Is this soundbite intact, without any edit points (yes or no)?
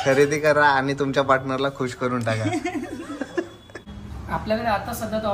no